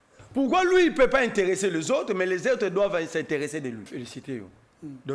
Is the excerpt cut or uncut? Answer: cut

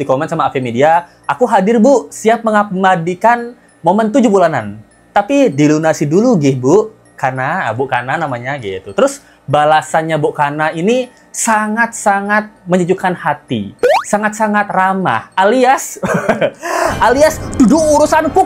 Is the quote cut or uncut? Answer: uncut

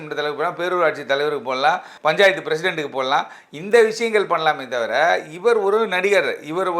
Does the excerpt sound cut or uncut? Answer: cut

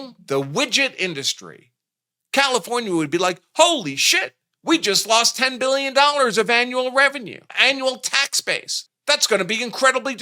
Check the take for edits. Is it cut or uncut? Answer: uncut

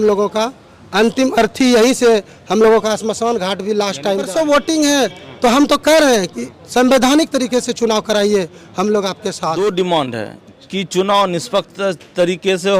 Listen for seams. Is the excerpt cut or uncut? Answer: cut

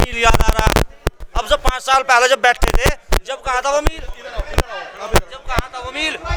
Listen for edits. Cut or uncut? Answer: uncut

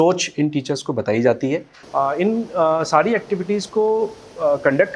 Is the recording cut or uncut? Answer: cut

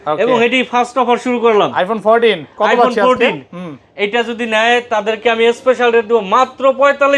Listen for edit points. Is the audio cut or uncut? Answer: uncut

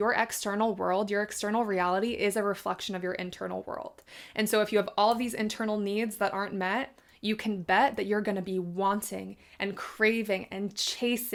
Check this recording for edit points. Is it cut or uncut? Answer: uncut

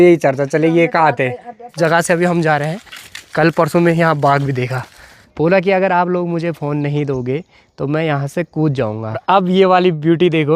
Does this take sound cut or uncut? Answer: cut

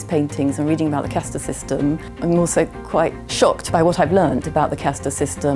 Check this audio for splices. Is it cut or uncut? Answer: cut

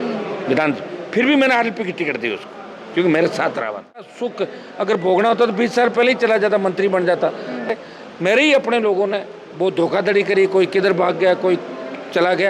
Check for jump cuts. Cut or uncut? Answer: cut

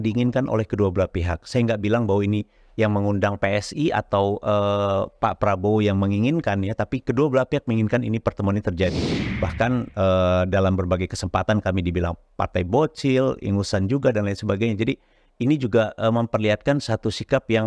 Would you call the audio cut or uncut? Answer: cut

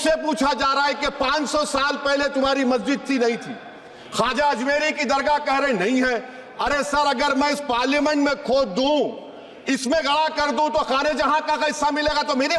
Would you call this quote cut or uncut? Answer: uncut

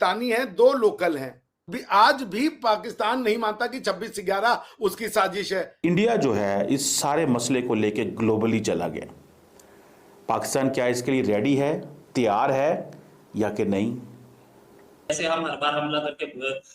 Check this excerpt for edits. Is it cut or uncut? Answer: cut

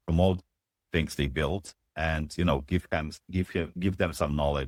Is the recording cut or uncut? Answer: uncut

